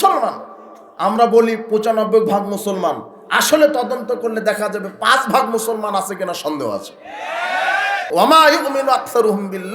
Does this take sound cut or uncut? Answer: cut